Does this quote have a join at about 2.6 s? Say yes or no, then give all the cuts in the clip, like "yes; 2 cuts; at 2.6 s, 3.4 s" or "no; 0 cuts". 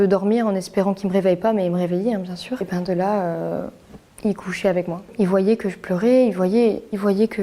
yes; 2 cuts; at 2.6 s, 5.0 s